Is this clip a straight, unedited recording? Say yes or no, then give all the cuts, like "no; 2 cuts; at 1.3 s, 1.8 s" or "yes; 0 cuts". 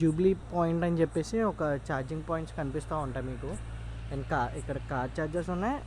yes; 0 cuts